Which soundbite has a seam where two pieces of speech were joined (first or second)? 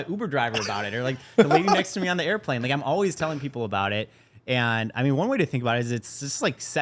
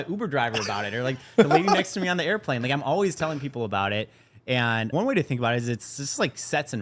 second